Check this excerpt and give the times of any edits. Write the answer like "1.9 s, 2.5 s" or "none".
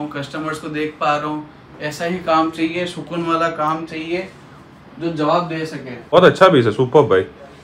6.1 s